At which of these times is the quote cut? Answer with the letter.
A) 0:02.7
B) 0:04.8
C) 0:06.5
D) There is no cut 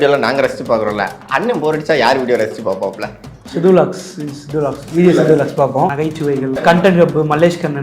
C